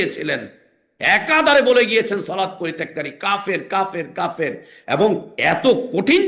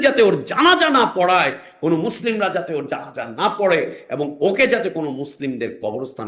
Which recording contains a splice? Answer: first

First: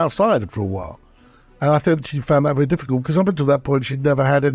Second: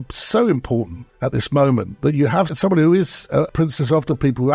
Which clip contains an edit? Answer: second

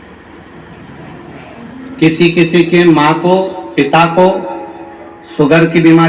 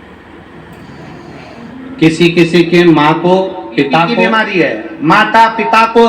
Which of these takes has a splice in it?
second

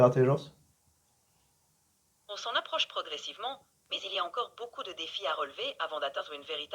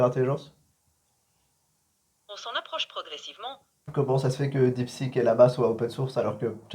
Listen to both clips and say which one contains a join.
second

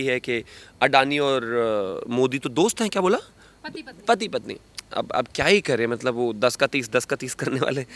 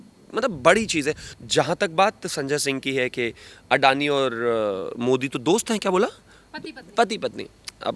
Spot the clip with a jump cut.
second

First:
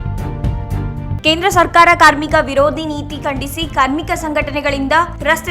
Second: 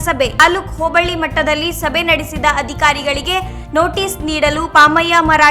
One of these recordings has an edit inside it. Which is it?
first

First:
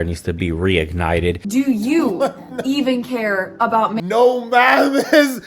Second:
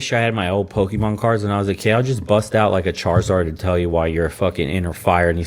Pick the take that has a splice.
first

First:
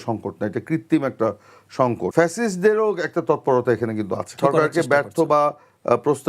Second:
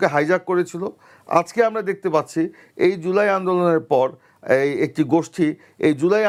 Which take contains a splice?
first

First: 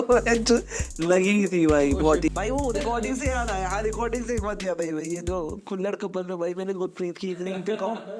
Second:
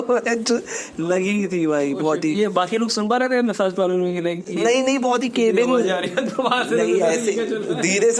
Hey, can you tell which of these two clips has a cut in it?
first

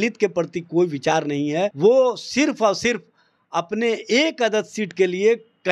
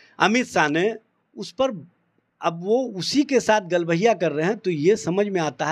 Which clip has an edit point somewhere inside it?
first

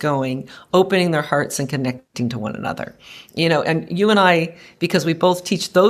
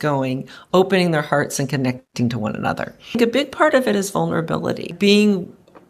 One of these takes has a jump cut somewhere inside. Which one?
second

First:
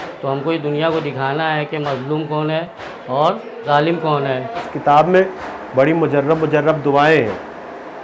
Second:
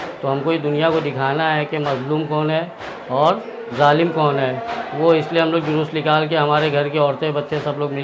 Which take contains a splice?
first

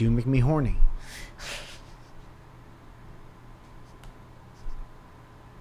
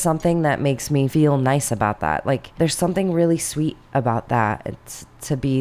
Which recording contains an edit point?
second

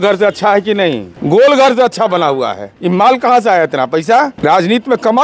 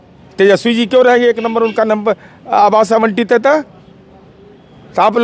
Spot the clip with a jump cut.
first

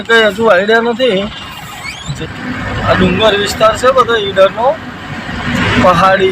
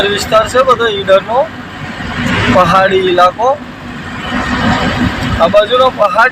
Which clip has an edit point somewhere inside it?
first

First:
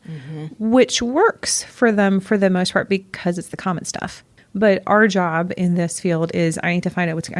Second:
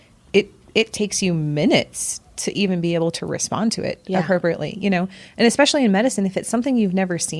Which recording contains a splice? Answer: first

